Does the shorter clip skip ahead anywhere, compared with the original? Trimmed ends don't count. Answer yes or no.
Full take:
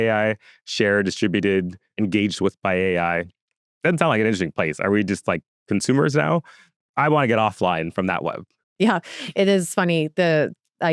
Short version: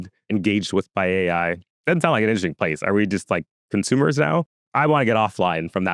yes